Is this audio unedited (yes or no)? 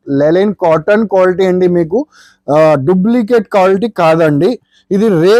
yes